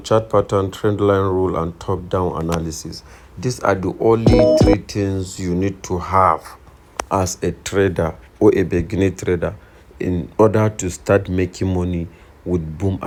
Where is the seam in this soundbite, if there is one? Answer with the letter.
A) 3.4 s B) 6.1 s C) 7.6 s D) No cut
D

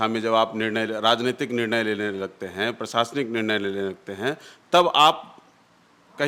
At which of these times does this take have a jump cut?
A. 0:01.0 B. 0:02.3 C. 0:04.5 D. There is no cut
D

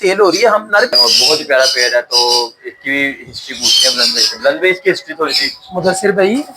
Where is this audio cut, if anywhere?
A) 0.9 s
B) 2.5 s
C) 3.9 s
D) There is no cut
A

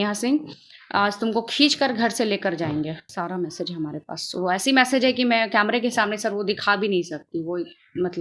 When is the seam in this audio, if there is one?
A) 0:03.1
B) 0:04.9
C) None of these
A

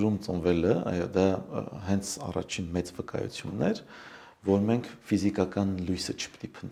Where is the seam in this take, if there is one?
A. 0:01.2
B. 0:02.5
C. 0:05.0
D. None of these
D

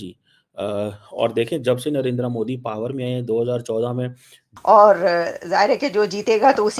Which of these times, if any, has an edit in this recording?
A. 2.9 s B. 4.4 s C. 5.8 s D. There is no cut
B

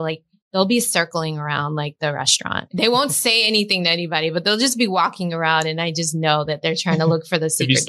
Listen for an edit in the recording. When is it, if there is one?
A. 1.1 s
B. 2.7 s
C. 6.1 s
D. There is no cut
B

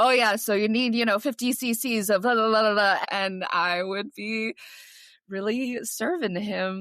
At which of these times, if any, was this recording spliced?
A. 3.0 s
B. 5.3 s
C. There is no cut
A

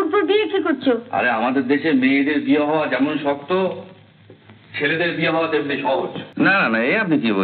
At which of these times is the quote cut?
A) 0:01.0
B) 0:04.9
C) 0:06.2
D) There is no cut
C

